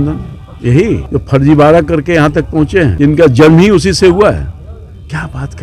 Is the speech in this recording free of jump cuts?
no; 2 cuts; at 1.0 s, 2.9 s

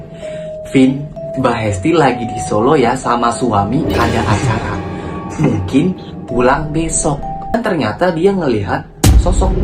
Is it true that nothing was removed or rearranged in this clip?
no; 1 cut; at 7.5 s

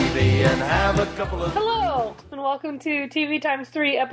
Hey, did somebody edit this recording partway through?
yes; 1 cut; at 1.5 s

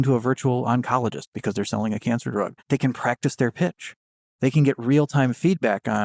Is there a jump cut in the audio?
yes; 1 cut; at 2.6 s

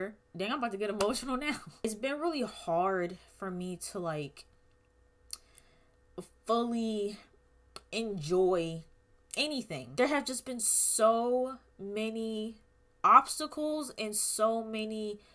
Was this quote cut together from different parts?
yes; 2 cuts; at 1.9 s, 9.8 s

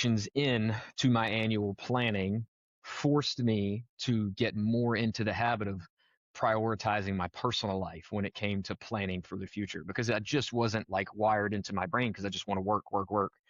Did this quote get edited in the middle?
no; 0 cuts

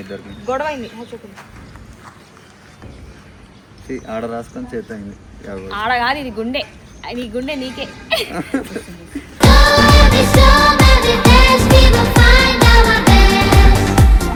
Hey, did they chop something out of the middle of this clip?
no; 0 cuts

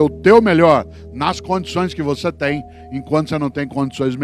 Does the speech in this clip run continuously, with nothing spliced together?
yes; 0 cuts

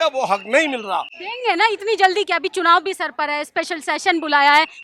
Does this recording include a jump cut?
no; 0 cuts

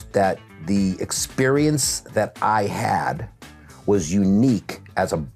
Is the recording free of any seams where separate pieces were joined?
yes; 0 cuts

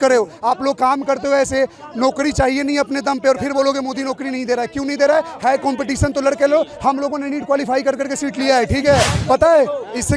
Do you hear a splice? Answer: yes; 1 cut; at 9.2 s

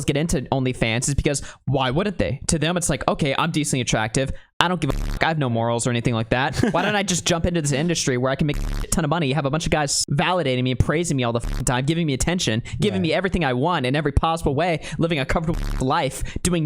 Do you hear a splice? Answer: yes; 1 cut; at 10.0 s

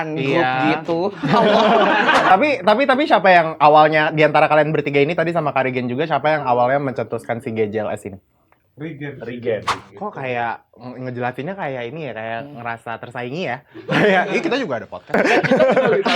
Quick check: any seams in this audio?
yes; 3 cuts; at 2.3 s, 9.8 s, 15.2 s

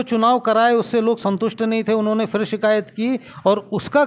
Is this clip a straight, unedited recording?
yes; 0 cuts

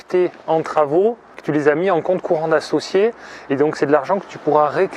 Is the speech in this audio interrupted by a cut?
yes; 1 cut; at 1.3 s

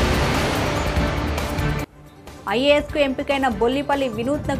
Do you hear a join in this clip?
yes; 1 cut; at 1.4 s

